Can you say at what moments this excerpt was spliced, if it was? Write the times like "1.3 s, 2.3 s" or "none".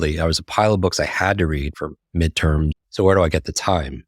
1.7 s, 2.7 s